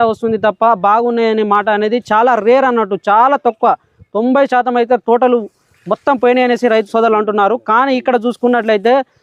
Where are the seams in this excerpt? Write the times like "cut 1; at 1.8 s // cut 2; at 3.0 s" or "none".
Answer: none